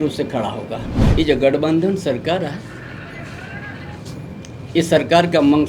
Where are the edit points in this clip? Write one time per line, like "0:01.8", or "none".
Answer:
0:01.0